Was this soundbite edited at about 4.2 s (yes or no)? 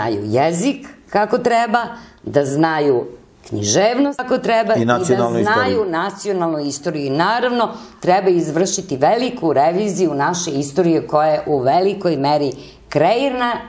yes